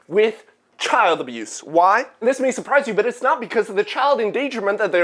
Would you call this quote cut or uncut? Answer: uncut